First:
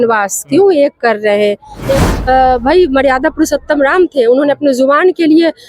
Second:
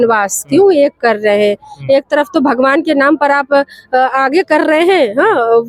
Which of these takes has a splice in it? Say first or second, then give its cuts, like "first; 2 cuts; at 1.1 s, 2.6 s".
first; 1 cut; at 2.0 s